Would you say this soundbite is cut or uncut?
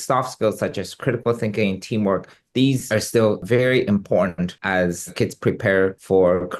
uncut